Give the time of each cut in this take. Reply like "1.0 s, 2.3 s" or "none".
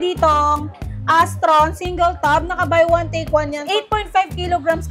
3.6 s